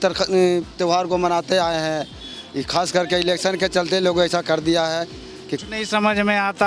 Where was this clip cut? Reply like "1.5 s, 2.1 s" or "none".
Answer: 5.6 s